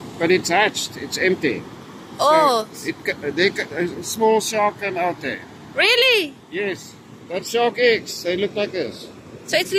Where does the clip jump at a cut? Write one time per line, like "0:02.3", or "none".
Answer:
none